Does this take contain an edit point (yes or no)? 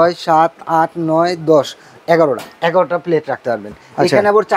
no